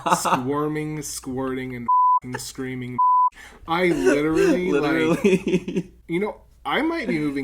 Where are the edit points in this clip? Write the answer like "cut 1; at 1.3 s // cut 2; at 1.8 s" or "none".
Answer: cut 1; at 6.0 s